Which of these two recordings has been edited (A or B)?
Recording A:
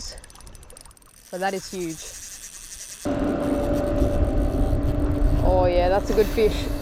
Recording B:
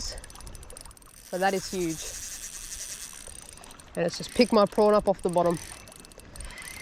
A